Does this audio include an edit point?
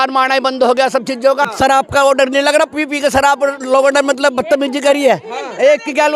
yes; 1 cut; at 1.5 s

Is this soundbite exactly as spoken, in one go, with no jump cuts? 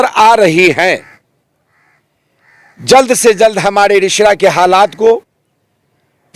yes; 0 cuts

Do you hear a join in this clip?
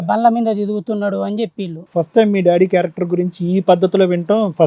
yes; 1 cut; at 1.8 s

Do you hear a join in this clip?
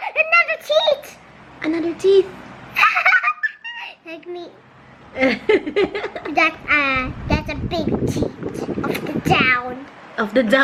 no; 0 cuts

